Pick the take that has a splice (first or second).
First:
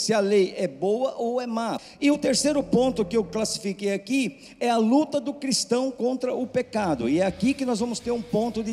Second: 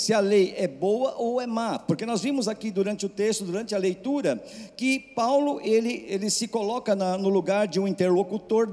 first